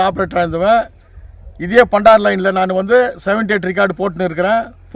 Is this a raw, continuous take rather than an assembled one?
yes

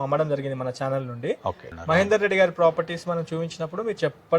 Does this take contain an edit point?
yes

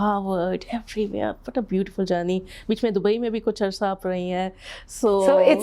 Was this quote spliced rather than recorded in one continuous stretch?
no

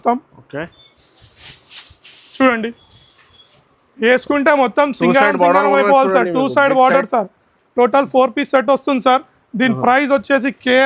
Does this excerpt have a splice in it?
no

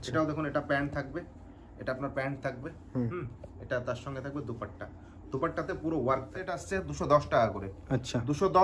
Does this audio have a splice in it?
yes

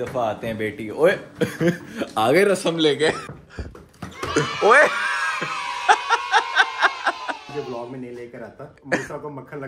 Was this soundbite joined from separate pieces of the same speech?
yes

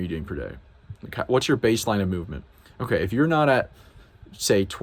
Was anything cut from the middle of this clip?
no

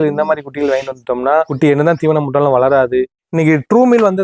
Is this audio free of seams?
no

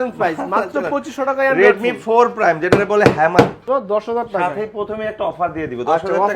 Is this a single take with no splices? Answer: no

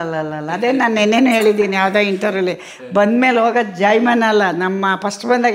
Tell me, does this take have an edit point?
no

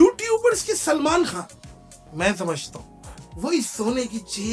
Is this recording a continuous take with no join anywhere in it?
yes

